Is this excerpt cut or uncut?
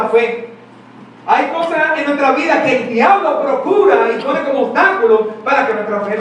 uncut